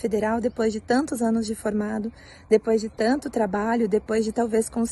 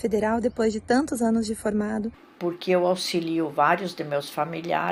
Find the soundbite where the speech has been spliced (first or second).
second